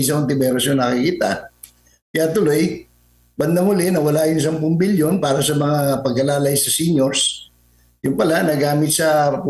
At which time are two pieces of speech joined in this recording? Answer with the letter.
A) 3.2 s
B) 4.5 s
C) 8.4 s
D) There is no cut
D